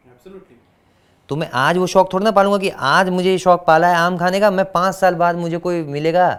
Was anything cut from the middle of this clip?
no; 0 cuts

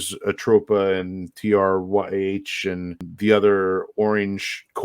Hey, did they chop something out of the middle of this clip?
yes; 1 cut; at 3.0 s

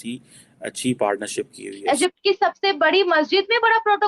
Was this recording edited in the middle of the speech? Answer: yes; 1 cut; at 1.7 s

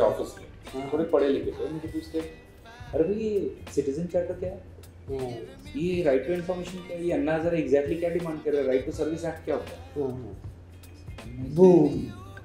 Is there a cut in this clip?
no; 0 cuts

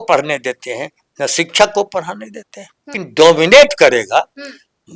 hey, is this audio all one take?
no; 1 cut; at 3.0 s

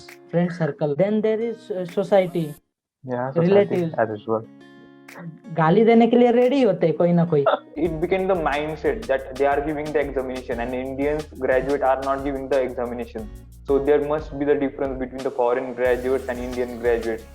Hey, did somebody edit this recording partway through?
yes; 2 cuts; at 0.9 s, 7.7 s

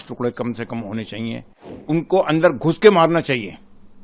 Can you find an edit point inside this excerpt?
yes; 1 cut; at 1.8 s

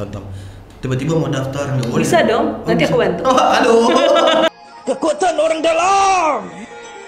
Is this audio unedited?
no; 1 cut; at 4.5 s

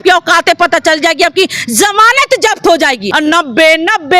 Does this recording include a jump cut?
yes; 1 cut; at 3.1 s

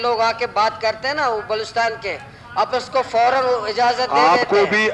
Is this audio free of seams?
yes; 0 cuts

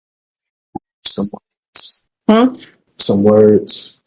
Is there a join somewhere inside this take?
no; 0 cuts

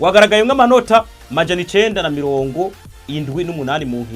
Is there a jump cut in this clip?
no; 0 cuts

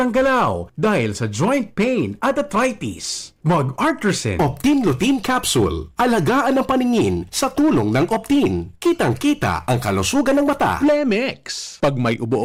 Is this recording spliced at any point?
no; 0 cuts

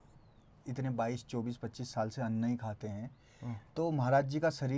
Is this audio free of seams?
yes; 0 cuts

